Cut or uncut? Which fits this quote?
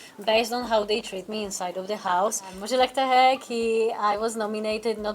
cut